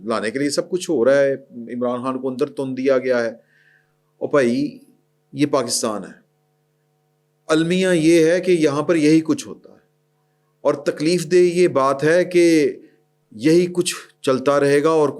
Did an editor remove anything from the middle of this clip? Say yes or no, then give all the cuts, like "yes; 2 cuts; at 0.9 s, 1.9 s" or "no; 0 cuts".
no; 0 cuts